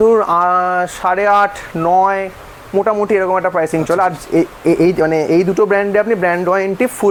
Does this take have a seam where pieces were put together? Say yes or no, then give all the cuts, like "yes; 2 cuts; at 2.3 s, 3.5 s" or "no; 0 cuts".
no; 0 cuts